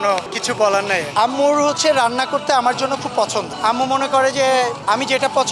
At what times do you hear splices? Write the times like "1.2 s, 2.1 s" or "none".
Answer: none